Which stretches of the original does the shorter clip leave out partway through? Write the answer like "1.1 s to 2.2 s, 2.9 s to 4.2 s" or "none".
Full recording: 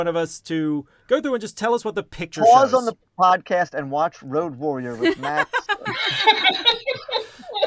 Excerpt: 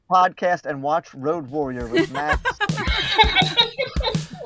none